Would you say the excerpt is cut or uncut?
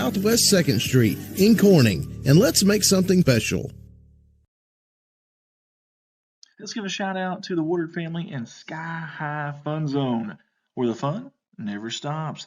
cut